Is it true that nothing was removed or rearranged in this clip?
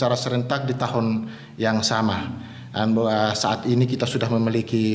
yes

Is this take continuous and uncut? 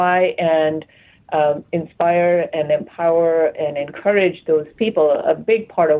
yes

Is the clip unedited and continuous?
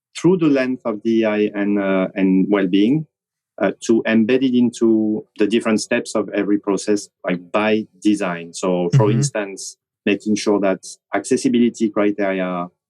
no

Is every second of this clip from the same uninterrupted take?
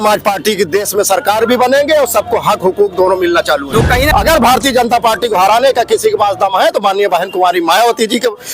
no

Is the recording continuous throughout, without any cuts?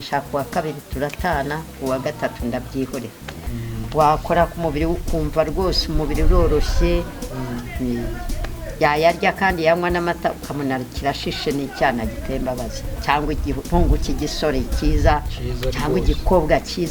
no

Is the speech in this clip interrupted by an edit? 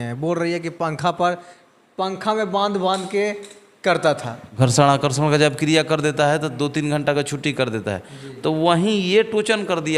yes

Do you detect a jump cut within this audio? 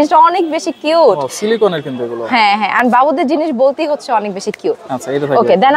no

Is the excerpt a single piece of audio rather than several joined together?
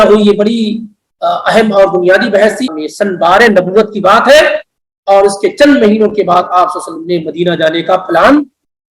no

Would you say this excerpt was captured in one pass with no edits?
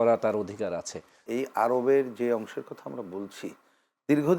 no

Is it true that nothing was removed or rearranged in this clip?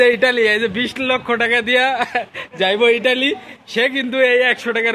yes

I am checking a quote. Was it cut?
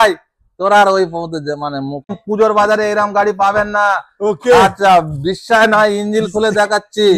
yes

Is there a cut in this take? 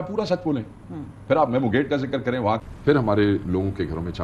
yes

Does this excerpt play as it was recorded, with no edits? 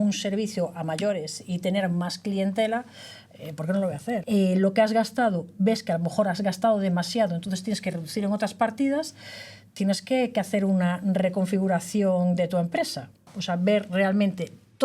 no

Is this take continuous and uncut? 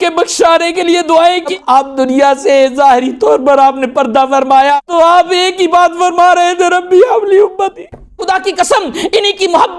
no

